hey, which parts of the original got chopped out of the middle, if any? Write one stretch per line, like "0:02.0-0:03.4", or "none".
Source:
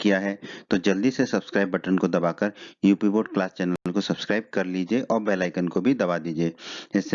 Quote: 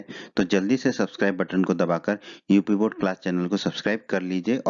0:03.8-0:03.9